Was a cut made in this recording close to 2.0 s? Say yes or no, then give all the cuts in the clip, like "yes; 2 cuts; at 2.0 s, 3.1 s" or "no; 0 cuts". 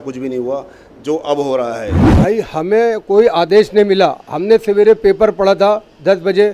yes; 1 cut; at 2.0 s